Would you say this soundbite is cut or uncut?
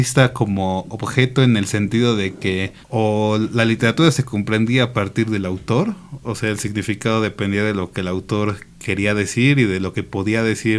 uncut